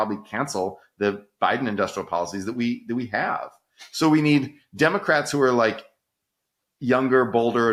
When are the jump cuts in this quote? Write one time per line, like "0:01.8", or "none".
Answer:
none